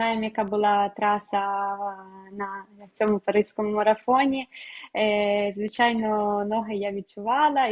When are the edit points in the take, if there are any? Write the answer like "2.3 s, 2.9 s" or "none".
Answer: none